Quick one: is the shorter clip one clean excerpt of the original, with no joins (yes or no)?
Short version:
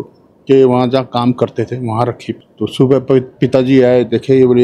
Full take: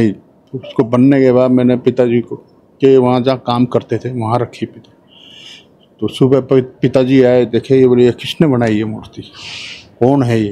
no